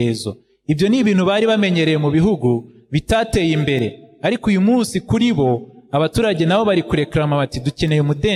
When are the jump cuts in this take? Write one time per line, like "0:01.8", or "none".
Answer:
none